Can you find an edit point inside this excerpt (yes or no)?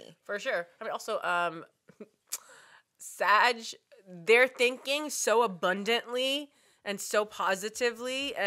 no